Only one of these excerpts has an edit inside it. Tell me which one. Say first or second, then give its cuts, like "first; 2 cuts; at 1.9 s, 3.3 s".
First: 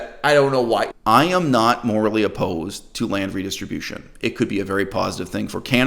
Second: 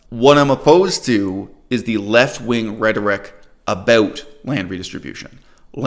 first; 1 cut; at 0.9 s